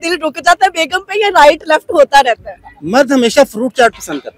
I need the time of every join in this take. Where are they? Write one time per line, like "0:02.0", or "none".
none